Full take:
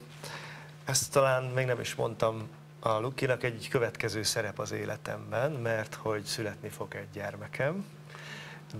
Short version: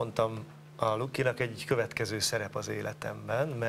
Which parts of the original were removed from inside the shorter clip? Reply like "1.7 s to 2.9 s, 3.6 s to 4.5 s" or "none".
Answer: none